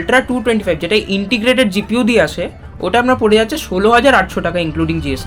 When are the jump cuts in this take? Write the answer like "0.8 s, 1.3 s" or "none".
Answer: none